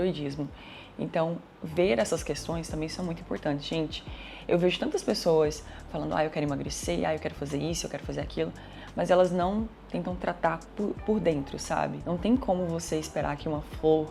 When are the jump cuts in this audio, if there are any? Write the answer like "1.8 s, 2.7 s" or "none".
none